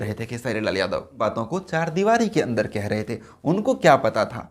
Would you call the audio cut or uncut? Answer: cut